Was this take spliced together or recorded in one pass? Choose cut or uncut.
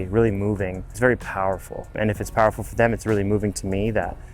cut